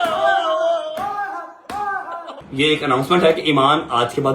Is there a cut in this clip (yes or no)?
yes